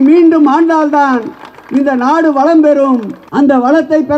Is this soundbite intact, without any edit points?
no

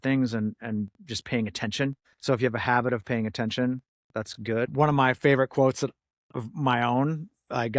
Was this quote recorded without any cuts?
no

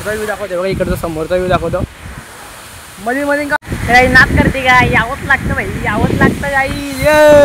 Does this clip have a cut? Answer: yes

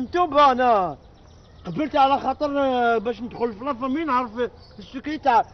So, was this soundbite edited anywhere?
no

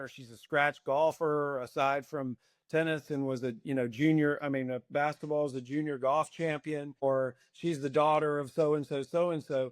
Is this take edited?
yes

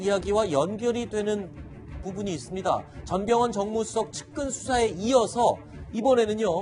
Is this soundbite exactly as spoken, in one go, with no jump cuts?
yes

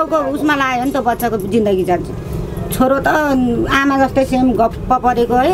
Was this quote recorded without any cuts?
yes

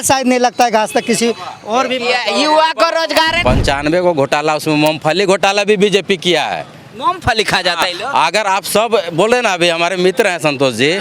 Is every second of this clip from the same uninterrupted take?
no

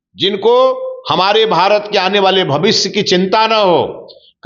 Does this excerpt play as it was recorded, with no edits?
yes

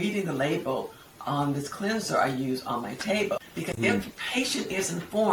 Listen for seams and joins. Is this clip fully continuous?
no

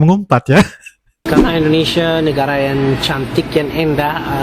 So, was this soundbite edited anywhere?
yes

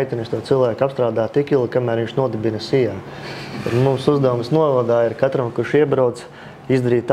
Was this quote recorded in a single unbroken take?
yes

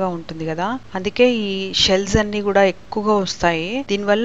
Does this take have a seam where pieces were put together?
no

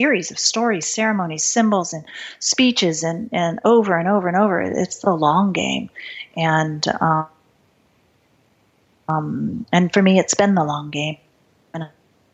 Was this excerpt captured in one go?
yes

